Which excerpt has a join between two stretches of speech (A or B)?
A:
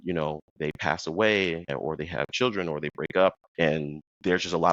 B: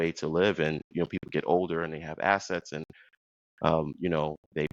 A